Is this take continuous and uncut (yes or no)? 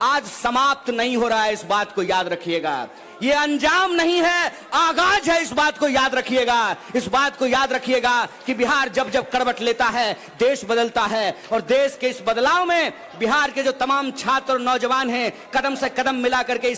yes